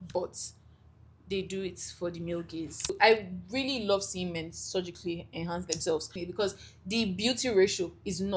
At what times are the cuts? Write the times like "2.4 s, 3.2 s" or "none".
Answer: 2.9 s, 6.2 s